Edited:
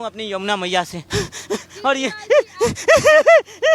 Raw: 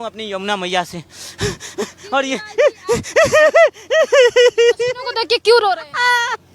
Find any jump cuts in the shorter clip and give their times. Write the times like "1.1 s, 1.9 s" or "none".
1.0 s